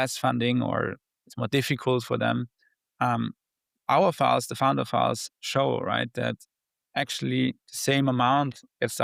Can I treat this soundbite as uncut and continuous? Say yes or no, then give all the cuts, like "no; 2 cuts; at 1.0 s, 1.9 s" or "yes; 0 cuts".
yes; 0 cuts